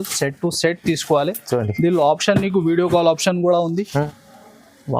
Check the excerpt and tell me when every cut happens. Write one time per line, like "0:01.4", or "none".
0:04.1